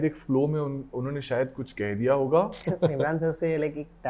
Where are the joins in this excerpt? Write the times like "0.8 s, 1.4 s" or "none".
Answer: 2.6 s

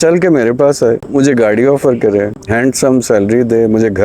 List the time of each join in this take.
1.0 s, 2.4 s

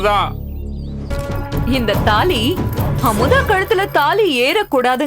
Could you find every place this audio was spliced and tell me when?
1.1 s

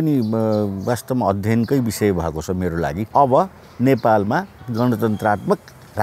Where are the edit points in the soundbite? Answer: 3.0 s, 4.6 s

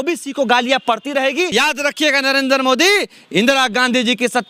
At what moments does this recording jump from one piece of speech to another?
1.5 s

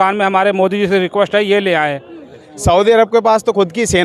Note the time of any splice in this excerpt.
2.5 s

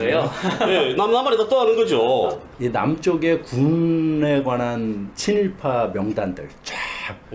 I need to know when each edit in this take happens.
2.5 s

